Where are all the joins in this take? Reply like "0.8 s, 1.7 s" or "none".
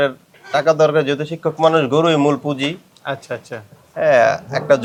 none